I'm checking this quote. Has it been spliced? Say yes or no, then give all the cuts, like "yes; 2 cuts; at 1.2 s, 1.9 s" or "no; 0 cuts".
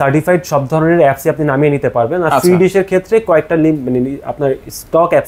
no; 0 cuts